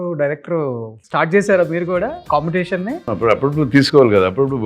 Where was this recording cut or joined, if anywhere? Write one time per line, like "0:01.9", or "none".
0:00.9
0:02.2
0:03.0

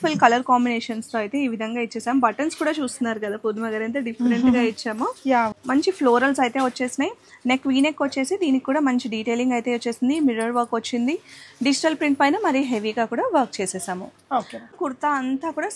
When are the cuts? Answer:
0:05.5
0:14.7

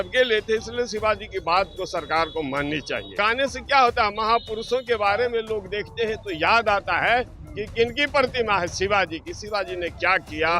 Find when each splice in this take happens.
0:03.2

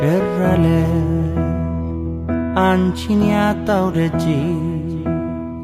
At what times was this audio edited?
none

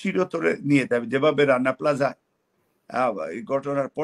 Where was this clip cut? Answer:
none

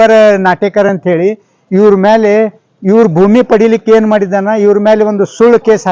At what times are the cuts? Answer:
none

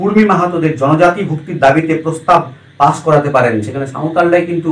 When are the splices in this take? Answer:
none

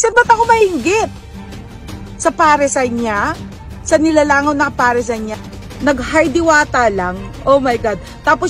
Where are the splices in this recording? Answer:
0:05.3

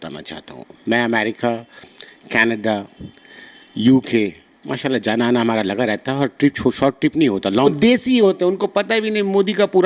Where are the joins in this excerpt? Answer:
0:07.5

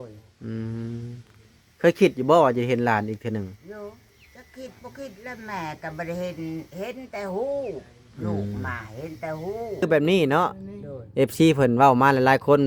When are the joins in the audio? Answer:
0:09.8

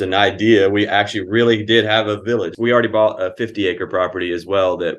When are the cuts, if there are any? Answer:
0:02.5

